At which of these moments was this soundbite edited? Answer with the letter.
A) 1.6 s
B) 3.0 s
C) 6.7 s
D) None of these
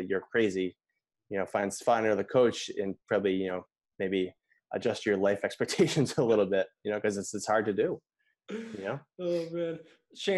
D